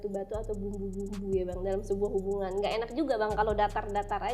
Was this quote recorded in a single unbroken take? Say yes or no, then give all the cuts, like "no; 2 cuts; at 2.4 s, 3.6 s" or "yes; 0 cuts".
yes; 0 cuts